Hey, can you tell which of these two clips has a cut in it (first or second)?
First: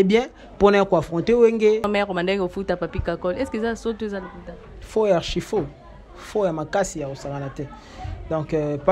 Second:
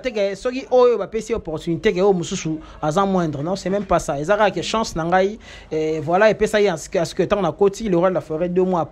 first